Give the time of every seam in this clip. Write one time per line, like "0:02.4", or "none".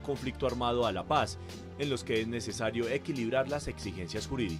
none

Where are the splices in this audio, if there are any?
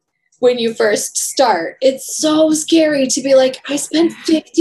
none

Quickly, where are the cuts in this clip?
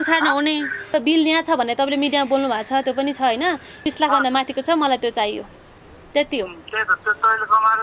0:00.9
0:03.8

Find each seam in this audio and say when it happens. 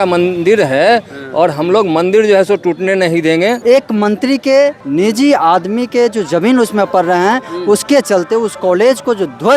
0:03.6
0:04.8

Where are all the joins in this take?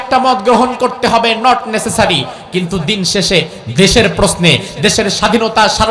none

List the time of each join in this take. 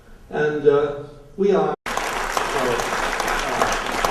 none

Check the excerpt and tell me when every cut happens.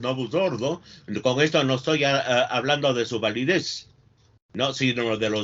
none

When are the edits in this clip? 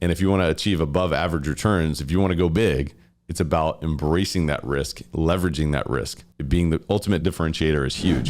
0:06.9

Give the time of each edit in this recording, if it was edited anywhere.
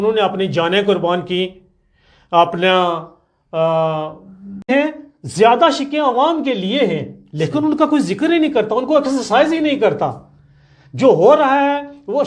0:04.7

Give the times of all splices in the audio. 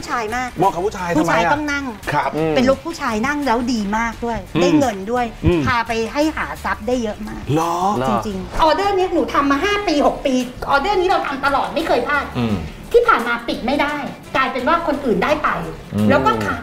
0:02.0
0:08.5
0:14.2

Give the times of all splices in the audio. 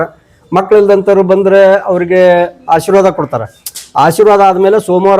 none

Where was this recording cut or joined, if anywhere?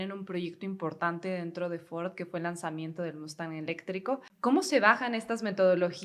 0:04.3

